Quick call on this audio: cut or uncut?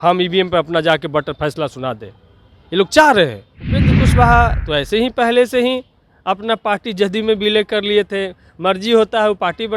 cut